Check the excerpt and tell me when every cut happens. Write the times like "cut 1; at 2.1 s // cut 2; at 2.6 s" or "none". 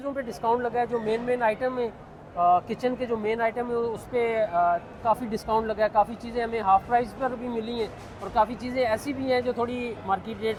none